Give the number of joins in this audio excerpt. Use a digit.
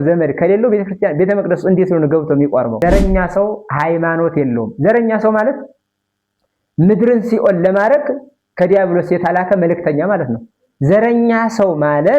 1